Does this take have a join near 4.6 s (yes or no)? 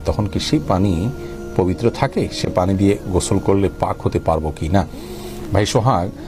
no